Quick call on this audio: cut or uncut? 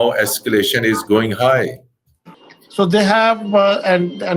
cut